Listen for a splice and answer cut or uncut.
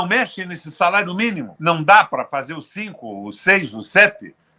cut